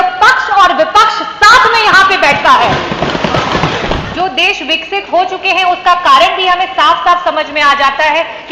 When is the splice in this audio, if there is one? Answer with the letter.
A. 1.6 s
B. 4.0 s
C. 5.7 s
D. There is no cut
B